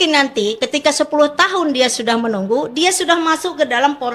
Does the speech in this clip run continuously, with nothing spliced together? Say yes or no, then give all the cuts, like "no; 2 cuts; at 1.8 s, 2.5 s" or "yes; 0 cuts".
yes; 0 cuts